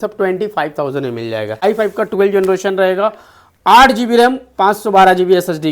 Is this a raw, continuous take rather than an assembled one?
no; 1 cut; at 1.6 s

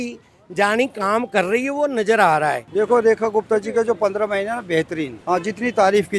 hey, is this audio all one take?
no; 2 cuts; at 2.6 s, 5.2 s

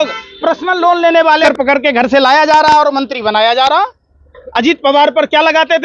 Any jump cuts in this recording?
yes; 1 cut; at 1.5 s

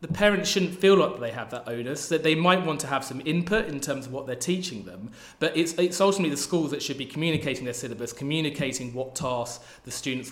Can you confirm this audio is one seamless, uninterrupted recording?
yes; 0 cuts

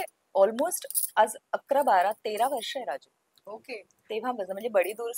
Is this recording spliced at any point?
no; 0 cuts

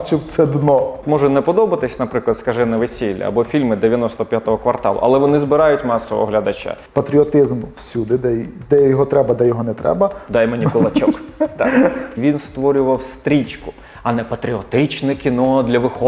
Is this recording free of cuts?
no; 3 cuts; at 1.0 s, 6.8 s, 12.1 s

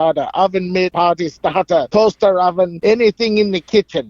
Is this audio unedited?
no; 3 cuts; at 0.9 s, 1.9 s, 2.8 s

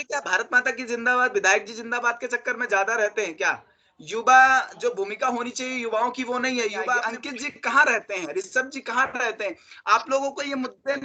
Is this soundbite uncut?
no; 1 cut; at 7.0 s

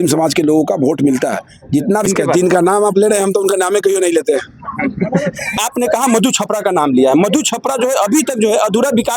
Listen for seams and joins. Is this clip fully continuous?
no; 2 cuts; at 2.1 s, 5.6 s

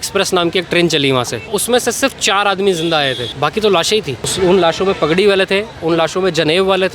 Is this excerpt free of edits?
no; 2 cuts; at 1.5 s, 4.2 s

